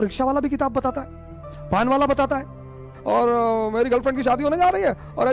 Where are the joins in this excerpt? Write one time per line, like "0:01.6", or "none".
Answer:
0:02.9

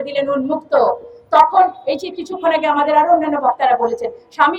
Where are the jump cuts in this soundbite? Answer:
none

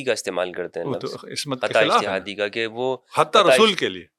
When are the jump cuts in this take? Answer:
none

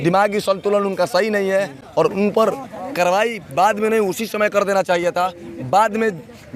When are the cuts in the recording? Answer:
none

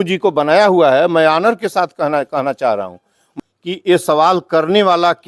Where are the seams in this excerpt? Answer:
0:03.2

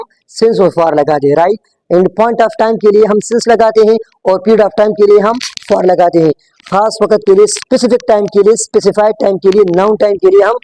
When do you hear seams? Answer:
none

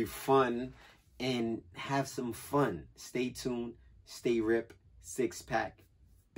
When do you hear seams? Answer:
none

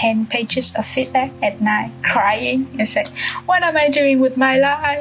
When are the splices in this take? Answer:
none

